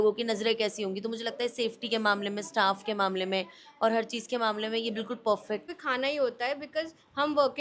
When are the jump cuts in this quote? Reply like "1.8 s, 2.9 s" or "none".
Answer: 5.6 s